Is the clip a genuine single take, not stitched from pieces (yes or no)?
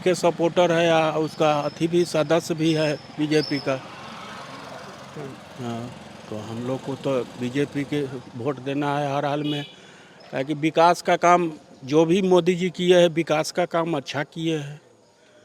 yes